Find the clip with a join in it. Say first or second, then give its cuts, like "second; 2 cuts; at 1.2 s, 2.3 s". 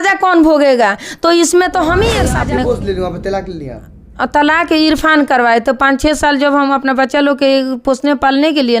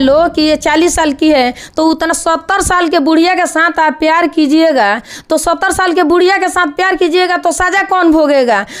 first; 1 cut; at 2.3 s